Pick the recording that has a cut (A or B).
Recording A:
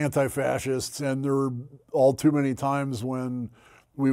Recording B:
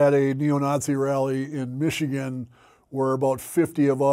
A